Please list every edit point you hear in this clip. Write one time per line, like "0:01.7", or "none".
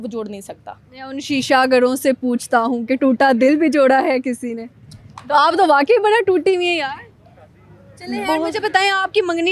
none